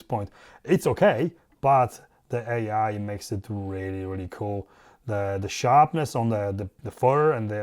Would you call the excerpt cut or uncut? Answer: uncut